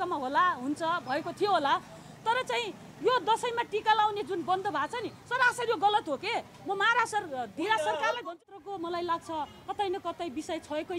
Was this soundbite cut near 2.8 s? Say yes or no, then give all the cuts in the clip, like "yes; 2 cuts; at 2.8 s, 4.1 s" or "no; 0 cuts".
no; 1 cut; at 8.4 s